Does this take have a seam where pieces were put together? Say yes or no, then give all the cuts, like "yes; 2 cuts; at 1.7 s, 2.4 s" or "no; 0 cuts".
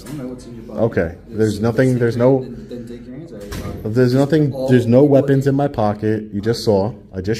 no; 0 cuts